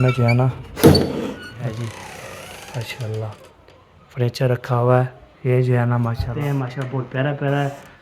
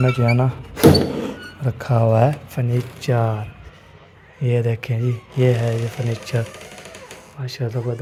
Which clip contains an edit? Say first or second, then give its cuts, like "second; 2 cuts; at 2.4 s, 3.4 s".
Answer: first; 2 cuts; at 1.7 s, 6.2 s